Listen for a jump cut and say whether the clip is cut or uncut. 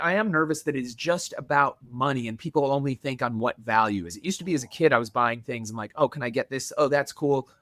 uncut